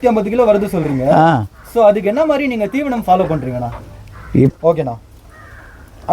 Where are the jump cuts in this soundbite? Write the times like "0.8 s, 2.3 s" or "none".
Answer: 4.5 s

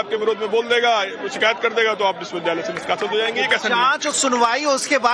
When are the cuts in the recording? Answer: none

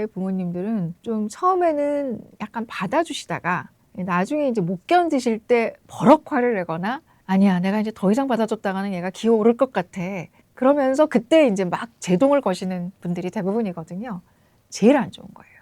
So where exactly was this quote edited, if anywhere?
1.0 s

